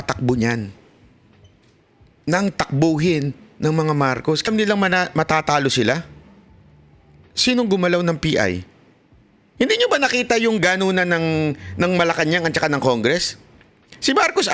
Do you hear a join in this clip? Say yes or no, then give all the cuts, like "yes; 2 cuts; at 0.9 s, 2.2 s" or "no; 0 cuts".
yes; 1 cut; at 4.5 s